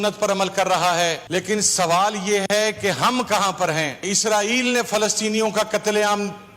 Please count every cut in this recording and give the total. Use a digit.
2